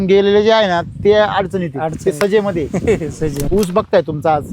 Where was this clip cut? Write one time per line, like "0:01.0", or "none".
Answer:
0:03.4